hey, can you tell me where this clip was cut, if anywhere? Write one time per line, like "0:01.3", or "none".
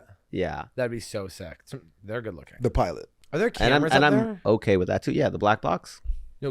0:03.2